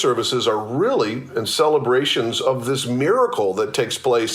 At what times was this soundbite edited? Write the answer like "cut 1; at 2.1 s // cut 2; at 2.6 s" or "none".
none